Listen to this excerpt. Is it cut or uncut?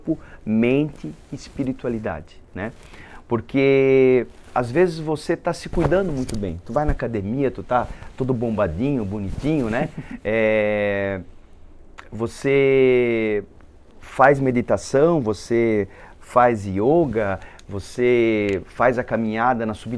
uncut